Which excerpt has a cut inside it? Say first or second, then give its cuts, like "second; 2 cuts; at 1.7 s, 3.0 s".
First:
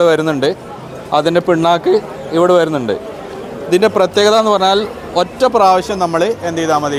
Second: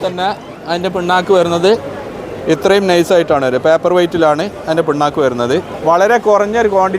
second; 1 cut; at 5.7 s